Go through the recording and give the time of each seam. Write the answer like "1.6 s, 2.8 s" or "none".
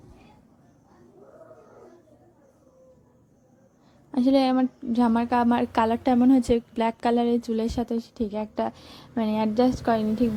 none